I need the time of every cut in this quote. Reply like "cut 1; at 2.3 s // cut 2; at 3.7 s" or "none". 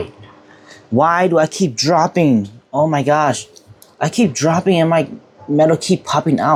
none